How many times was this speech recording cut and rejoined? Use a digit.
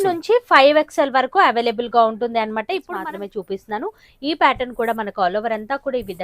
1